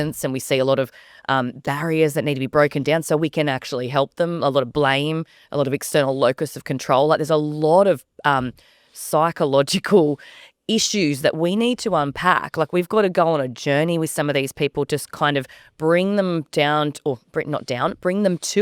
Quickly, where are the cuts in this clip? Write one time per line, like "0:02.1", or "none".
none